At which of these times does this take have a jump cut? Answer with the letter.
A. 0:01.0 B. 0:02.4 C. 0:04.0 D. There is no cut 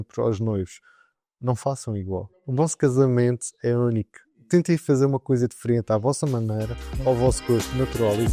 D